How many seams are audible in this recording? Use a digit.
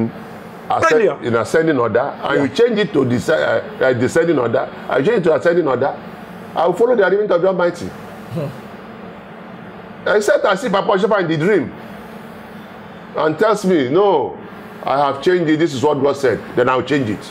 0